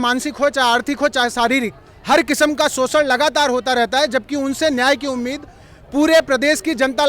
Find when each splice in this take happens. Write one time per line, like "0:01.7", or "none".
none